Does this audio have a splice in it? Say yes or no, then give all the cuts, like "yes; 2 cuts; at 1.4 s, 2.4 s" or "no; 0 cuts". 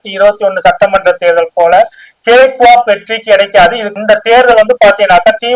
no; 0 cuts